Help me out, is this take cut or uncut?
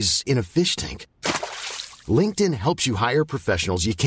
uncut